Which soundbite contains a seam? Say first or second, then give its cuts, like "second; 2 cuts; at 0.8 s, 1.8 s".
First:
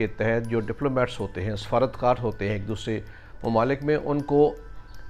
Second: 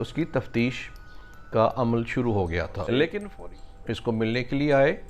second; 1 cut; at 3.2 s